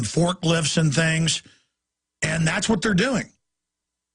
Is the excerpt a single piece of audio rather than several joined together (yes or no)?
no